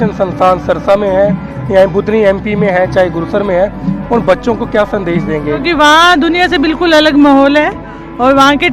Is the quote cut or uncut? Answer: cut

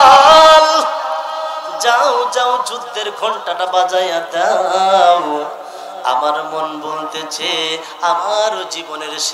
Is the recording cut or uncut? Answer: uncut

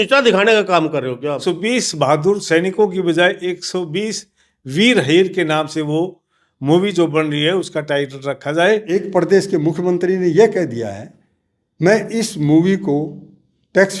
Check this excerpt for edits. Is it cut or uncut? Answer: cut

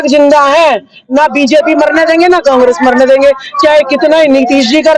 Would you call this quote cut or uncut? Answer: uncut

